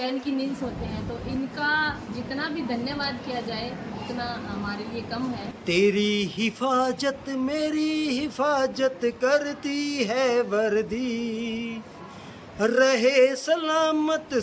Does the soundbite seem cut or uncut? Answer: cut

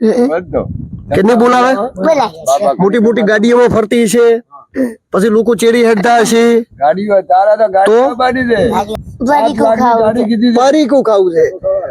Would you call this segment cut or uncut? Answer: cut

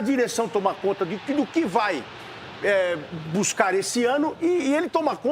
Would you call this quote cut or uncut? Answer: uncut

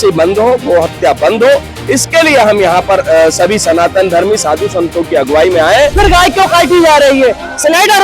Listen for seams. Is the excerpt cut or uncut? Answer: cut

